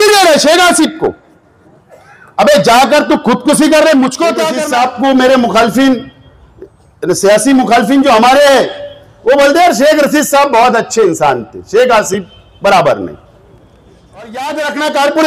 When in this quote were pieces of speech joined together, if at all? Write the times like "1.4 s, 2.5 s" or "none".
4.6 s, 14.4 s